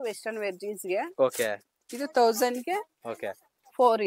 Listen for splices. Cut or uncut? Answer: uncut